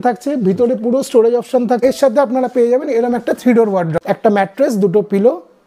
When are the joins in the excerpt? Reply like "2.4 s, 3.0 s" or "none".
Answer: 1.8 s, 4.0 s

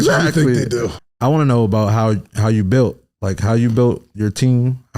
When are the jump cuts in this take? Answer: 1.0 s

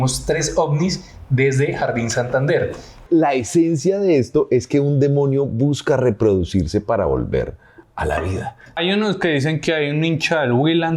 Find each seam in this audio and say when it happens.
3.0 s, 8.8 s

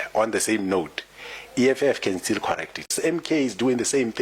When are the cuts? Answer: 2.9 s

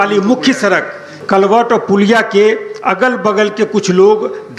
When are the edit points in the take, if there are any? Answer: 1.1 s

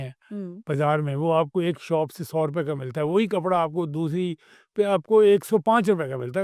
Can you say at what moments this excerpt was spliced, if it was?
none

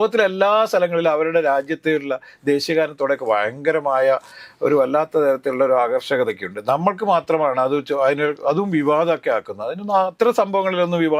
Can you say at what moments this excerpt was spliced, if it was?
none

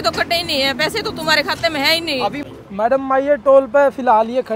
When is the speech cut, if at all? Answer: 2.4 s

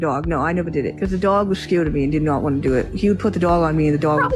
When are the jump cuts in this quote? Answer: 0.9 s

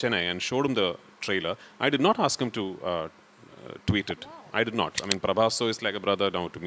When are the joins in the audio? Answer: 5.0 s

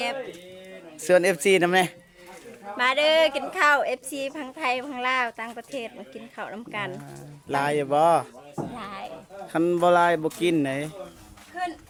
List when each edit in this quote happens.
none

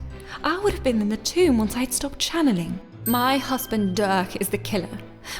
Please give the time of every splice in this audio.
2.8 s

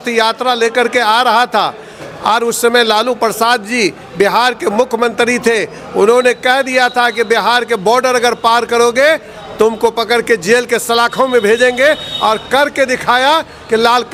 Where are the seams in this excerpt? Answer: none

